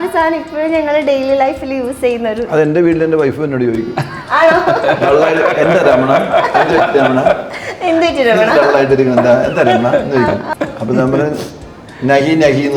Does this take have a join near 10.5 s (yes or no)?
yes